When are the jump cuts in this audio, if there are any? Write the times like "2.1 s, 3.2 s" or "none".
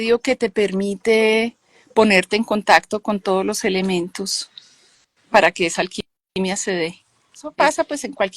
7.5 s